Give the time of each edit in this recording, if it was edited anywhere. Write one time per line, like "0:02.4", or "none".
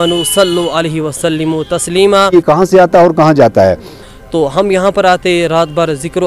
0:02.3
0:04.0

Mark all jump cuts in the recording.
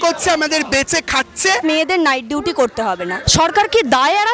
0:01.6
0:03.2

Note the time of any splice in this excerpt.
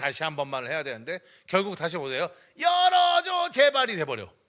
none

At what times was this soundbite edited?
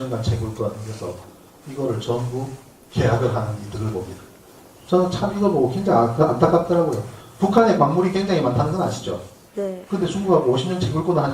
0:09.0

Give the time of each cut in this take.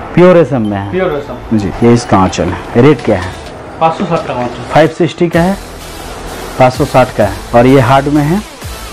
0:01.7
0:07.4

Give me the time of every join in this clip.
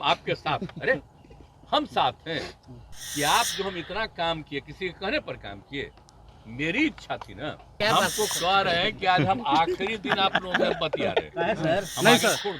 0:07.8

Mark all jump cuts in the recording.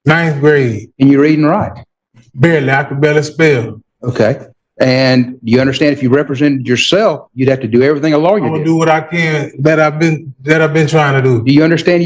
none

